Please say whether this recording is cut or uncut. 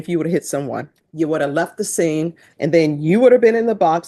cut